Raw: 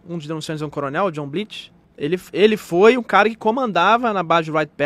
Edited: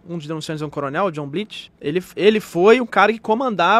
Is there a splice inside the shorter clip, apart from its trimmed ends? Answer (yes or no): yes